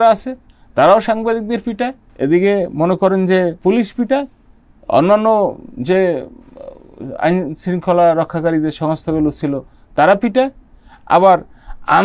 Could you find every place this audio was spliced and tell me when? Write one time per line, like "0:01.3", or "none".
0:02.0
0:03.6